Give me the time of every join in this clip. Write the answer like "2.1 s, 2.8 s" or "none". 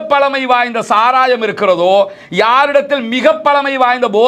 none